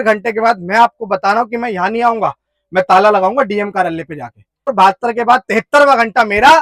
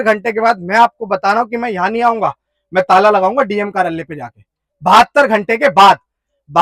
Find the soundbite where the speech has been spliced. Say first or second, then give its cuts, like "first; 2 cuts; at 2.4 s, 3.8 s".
first; 1 cut; at 4.7 s